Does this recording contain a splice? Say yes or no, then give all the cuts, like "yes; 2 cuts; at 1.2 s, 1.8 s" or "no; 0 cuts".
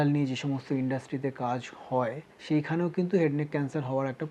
yes; 1 cut; at 2.3 s